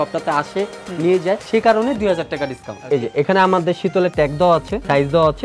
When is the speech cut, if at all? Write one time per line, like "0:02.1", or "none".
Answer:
0:02.7